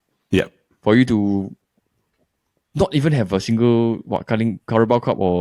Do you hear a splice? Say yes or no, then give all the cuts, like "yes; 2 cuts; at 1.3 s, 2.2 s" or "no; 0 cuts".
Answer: no; 0 cuts